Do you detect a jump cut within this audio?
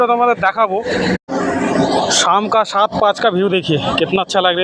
yes; 1 cut; at 1.1 s

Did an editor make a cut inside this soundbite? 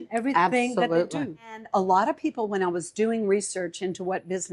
yes; 1 cut; at 1.7 s

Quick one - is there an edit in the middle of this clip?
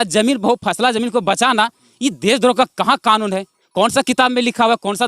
no; 0 cuts

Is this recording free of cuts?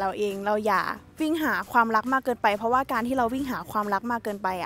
yes; 0 cuts

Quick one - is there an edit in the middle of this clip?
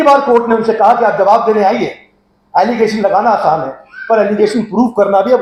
no; 0 cuts

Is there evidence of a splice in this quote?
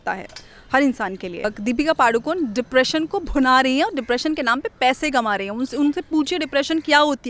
yes; 1 cut; at 1.5 s

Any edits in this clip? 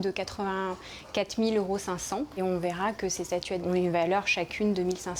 yes; 1 cut; at 3.7 s

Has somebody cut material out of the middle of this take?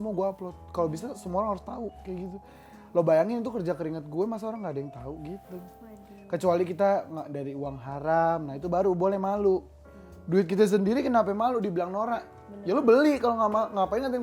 no; 0 cuts

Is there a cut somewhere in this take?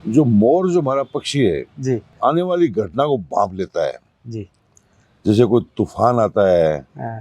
yes; 1 cut; at 2.1 s

